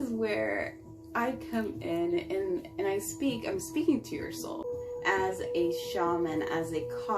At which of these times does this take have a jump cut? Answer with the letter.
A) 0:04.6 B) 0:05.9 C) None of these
A